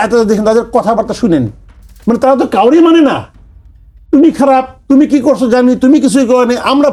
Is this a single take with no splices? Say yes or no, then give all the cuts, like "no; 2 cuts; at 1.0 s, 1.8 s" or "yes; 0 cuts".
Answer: yes; 0 cuts